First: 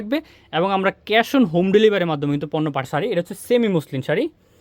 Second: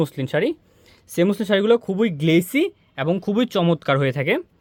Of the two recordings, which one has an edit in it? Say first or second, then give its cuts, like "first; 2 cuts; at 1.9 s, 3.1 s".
first; 1 cut; at 2.8 s